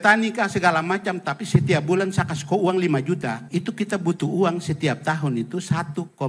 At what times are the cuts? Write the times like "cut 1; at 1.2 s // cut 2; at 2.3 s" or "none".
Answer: cut 1; at 3.4 s

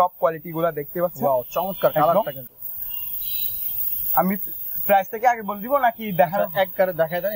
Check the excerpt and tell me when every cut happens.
none

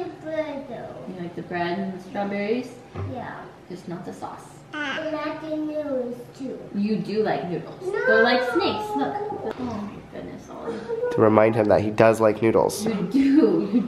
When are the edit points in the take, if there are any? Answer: cut 1; at 9.5 s

